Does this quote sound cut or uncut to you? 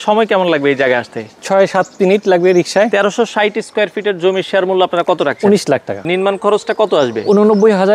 cut